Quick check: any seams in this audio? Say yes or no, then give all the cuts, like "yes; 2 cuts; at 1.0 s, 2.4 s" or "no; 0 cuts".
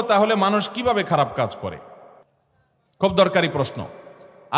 no; 0 cuts